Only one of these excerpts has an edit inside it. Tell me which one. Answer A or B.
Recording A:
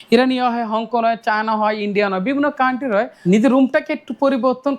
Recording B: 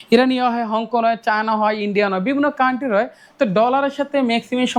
A